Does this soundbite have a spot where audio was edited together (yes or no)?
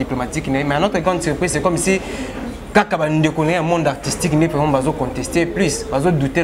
no